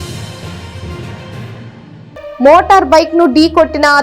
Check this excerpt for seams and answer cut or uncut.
cut